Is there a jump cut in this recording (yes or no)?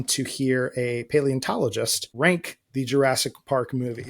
yes